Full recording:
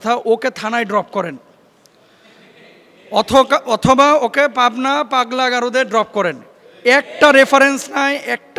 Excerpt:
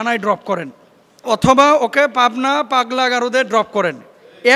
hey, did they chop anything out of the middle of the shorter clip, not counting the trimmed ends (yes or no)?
yes